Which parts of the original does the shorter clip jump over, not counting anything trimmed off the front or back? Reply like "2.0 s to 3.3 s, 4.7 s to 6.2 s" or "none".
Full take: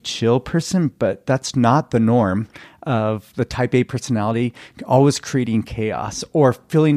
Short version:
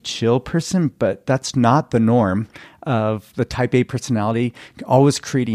none